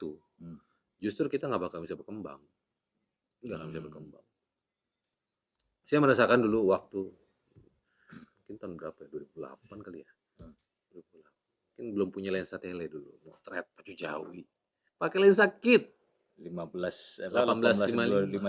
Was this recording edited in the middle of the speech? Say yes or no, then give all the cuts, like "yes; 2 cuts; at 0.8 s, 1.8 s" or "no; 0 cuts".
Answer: no; 0 cuts